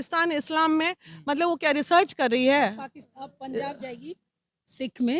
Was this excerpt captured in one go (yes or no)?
yes